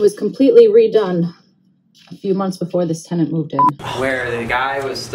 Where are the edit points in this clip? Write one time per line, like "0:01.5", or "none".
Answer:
0:03.8